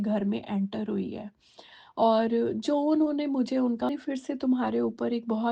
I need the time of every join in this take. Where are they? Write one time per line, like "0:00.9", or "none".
0:03.9